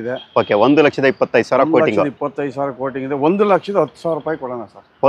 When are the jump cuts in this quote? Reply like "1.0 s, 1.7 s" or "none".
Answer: none